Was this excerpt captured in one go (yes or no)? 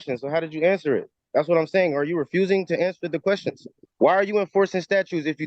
no